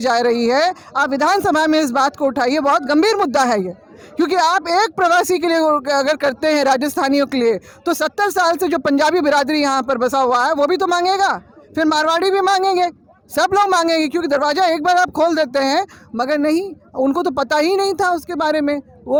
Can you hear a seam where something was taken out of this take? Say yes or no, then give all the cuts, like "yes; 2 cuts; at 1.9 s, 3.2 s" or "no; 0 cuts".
no; 0 cuts